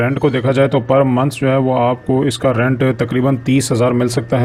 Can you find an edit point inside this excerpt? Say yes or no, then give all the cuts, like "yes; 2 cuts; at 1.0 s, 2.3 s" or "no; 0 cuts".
no; 0 cuts